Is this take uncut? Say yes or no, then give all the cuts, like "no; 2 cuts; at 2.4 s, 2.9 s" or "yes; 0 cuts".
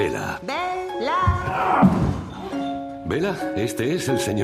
yes; 0 cuts